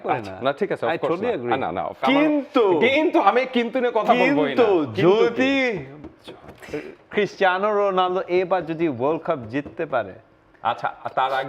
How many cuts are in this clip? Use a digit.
1